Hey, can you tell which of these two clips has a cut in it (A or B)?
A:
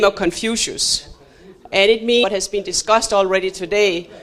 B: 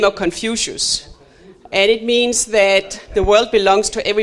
B